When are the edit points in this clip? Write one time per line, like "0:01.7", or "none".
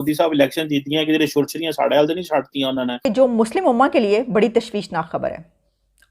0:03.1